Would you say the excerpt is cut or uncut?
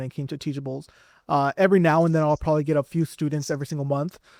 uncut